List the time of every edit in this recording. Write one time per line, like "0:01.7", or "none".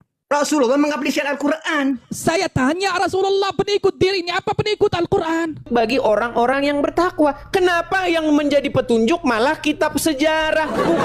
0:05.7